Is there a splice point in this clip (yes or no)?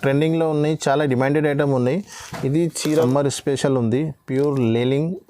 yes